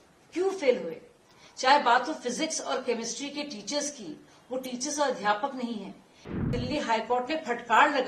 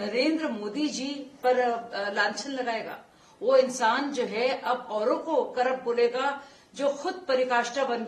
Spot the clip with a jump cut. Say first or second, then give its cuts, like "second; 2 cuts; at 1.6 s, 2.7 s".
first; 1 cut; at 6.5 s